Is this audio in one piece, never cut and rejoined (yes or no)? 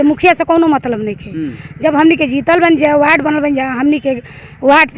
yes